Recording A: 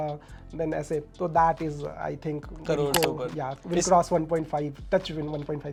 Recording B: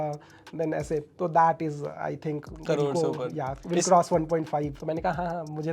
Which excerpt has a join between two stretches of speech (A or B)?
B